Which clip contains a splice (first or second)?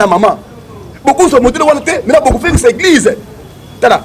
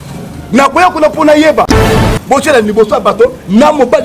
second